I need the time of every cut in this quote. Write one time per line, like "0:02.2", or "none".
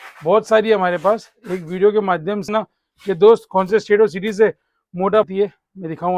0:02.5
0:05.2